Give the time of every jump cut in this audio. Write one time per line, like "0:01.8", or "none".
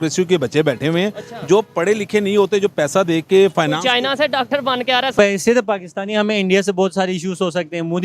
0:05.1

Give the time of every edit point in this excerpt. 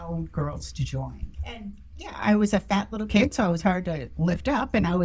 0:01.2

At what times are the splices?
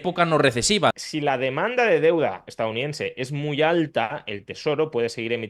0:00.9

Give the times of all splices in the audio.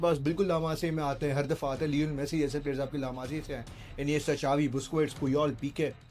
none

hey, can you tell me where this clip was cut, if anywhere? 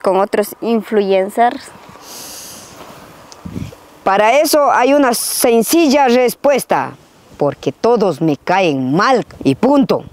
none

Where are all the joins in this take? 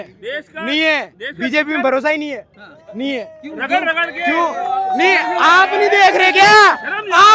none

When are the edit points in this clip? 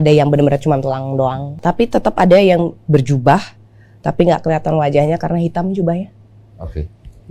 0:01.6

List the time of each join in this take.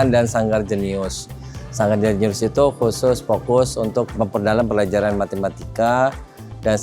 0:04.2

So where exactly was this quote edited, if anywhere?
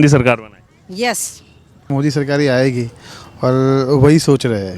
0:01.9

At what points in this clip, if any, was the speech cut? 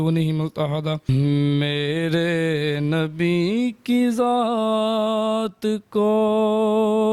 0:01.1

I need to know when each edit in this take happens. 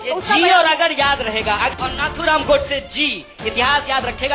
0:01.7

